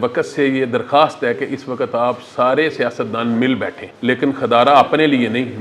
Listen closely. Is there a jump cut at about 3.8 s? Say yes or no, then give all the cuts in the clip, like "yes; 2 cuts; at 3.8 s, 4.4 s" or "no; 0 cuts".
yes; 1 cut; at 3.8 s